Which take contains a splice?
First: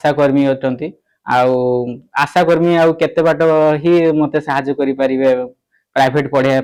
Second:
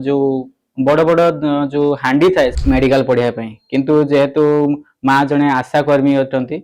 second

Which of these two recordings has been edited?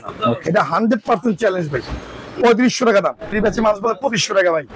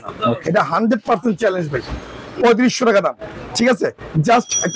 first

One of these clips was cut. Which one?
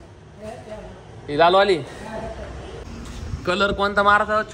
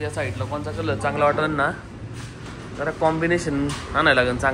first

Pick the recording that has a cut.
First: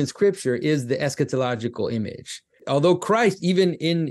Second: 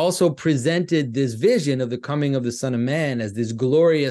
first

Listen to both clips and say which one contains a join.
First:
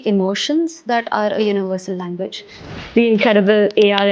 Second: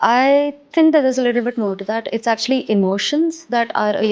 first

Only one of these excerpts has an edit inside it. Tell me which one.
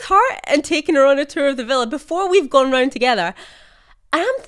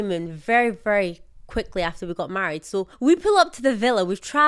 second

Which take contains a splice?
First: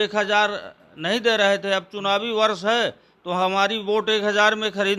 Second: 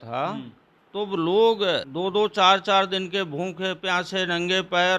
second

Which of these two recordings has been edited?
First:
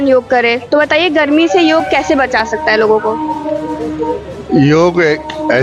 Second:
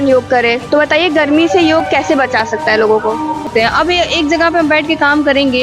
second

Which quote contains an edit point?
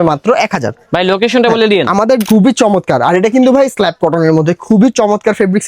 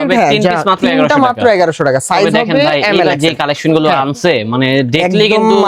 first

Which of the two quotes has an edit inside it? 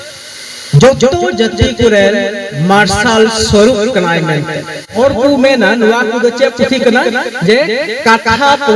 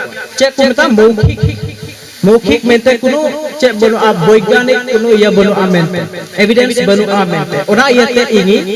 first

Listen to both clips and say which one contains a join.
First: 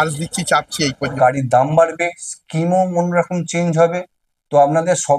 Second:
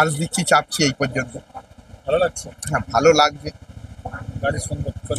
first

